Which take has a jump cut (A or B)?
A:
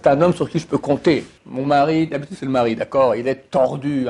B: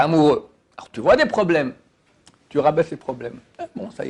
A